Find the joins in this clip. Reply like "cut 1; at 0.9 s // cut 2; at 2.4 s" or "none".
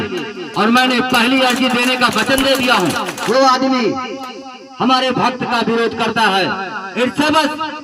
cut 1; at 3.1 s